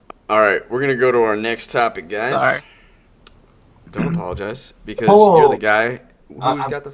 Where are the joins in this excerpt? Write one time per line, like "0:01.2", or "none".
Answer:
none